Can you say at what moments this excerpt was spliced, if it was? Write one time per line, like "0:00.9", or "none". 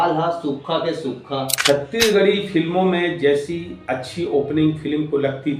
0:01.5